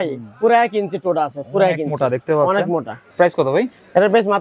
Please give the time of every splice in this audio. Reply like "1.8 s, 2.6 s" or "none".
3.0 s